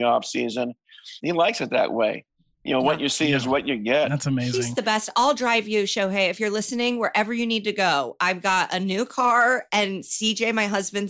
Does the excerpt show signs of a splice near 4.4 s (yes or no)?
yes